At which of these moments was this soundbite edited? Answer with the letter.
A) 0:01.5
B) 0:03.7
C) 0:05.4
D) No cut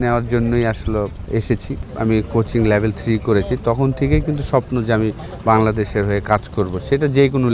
A